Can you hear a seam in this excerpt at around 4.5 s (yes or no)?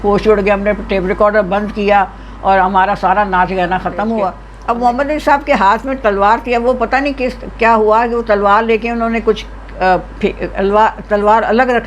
yes